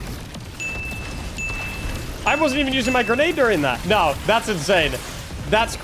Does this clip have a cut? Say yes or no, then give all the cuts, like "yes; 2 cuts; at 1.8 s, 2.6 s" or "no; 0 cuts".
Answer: yes; 1 cut; at 3.8 s